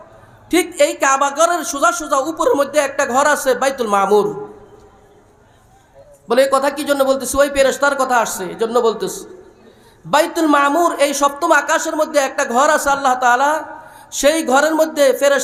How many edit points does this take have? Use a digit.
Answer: 0